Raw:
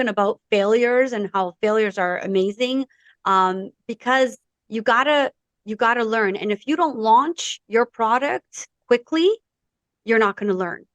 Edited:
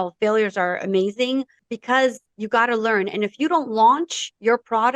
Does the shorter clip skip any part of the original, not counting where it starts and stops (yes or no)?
yes